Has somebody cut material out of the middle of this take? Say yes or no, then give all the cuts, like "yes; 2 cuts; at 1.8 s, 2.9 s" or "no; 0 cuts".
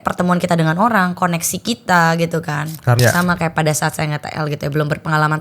yes; 1 cut; at 3.0 s